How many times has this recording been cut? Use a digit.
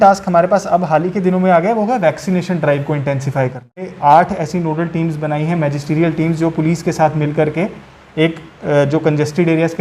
1